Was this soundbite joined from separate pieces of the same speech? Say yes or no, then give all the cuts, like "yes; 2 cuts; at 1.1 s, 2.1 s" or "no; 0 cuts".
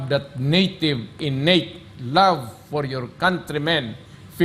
no; 0 cuts